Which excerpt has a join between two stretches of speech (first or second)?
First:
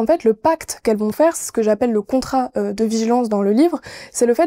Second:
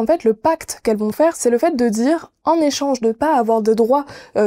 second